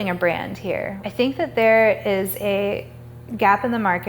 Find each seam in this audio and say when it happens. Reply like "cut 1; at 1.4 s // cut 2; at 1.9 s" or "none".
cut 1; at 0.9 s